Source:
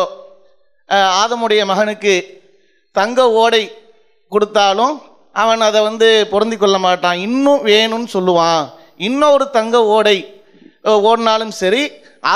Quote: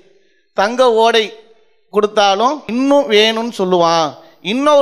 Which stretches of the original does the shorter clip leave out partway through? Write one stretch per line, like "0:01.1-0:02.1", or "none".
0:05.0-0:07.2